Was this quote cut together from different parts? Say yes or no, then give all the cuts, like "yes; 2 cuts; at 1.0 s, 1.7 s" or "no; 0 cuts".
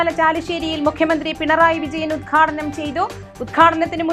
no; 0 cuts